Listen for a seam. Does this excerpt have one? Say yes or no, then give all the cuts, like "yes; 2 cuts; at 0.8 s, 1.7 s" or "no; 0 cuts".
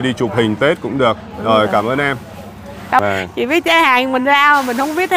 yes; 1 cut; at 3.0 s